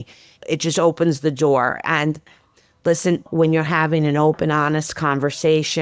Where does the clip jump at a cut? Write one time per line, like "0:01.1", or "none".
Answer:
0:03.3